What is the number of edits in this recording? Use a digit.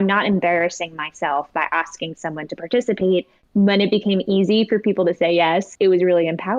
2